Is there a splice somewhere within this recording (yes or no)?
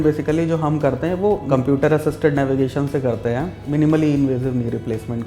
yes